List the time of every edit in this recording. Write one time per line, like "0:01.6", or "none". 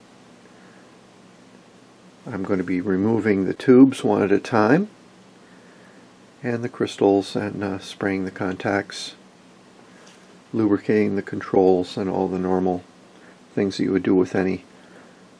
none